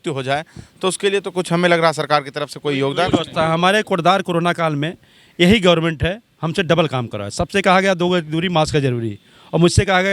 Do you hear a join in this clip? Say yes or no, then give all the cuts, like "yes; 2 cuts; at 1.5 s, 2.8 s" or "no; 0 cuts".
no; 0 cuts